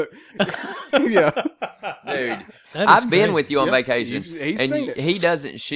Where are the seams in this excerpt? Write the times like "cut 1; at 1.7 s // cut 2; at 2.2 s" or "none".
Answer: cut 1; at 2.5 s